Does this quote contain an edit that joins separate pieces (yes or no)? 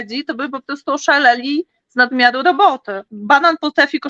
yes